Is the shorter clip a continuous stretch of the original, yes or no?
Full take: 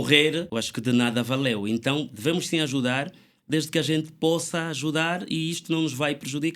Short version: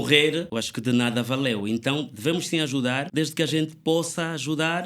no